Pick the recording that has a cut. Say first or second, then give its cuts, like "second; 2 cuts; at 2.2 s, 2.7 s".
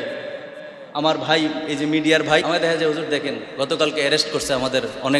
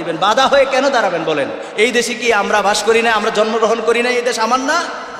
first; 1 cut; at 2.4 s